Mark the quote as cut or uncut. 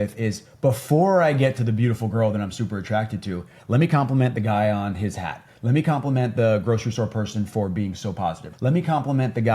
cut